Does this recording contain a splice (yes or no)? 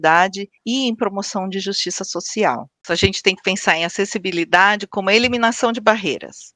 yes